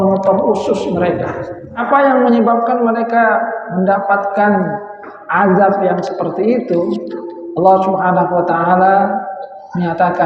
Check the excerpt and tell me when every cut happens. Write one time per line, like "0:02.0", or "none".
0:01.8